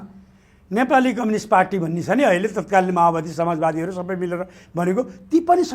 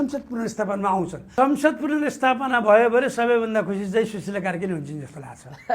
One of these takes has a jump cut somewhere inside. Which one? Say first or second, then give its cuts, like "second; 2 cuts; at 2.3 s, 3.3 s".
second; 1 cut; at 1.2 s